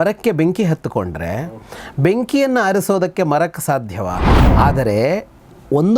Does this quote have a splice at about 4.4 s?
yes; 1 cut; at 4.4 s

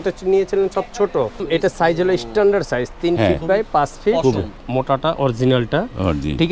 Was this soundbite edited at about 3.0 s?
no; 2 cuts; at 1.4 s, 4.5 s

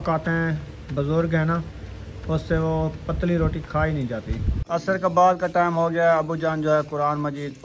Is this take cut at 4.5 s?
yes; 1 cut; at 4.5 s

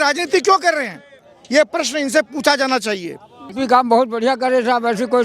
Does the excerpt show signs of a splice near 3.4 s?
yes; 1 cut; at 3.4 s

